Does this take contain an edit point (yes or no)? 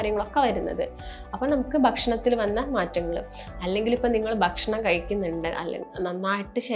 no